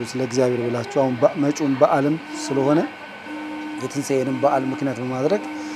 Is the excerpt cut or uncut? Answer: uncut